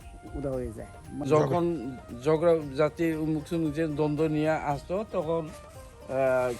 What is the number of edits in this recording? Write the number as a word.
one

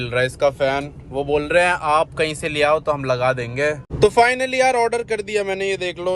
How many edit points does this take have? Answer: one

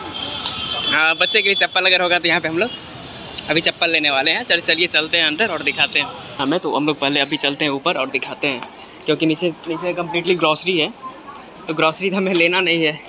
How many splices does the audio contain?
one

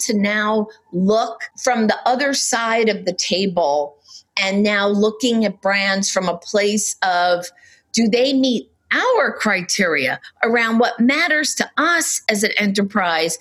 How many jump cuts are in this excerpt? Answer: one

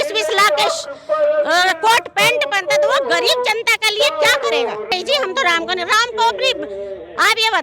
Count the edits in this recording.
one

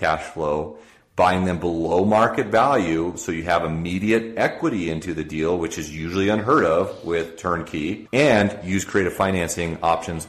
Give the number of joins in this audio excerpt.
one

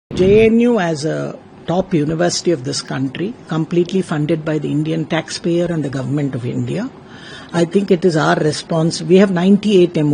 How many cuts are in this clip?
zero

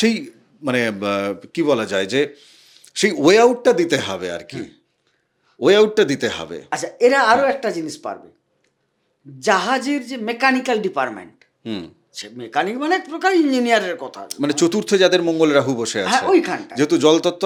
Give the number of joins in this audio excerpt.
zero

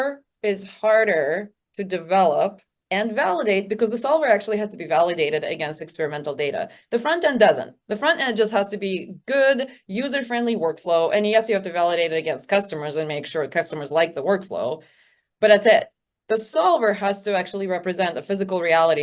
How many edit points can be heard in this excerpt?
zero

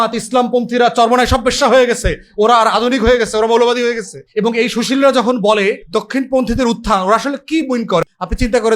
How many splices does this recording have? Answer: three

